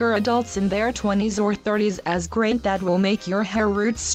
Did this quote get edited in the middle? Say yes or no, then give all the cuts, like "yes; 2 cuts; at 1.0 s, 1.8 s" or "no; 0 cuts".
no; 0 cuts